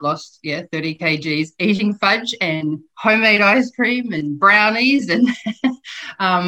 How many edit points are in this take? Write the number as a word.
zero